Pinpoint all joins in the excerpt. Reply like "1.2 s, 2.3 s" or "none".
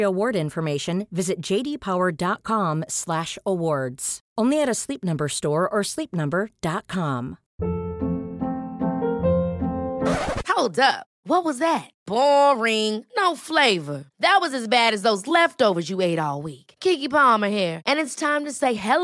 7.4 s